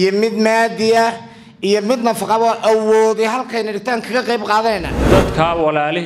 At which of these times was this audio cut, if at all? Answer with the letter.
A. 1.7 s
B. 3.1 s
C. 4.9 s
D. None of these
C